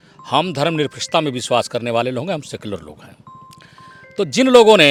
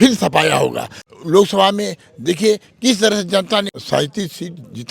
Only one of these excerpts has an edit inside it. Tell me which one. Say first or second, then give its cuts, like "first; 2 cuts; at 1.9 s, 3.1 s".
second; 2 cuts; at 1.1 s, 3.8 s